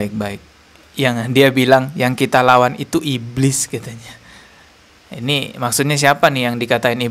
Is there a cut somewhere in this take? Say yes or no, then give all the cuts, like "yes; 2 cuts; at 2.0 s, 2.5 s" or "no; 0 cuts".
no; 0 cuts